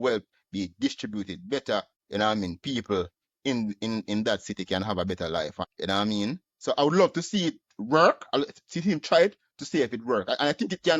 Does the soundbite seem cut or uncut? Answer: cut